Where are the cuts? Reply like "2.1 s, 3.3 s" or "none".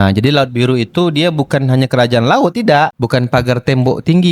2.9 s